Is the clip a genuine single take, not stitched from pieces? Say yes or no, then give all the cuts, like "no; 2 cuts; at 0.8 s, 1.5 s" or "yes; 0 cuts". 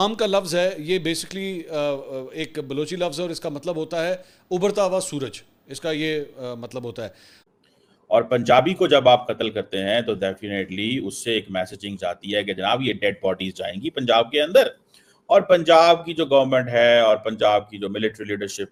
yes; 0 cuts